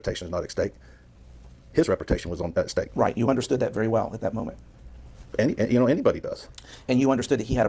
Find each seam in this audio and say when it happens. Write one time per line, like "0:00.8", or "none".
none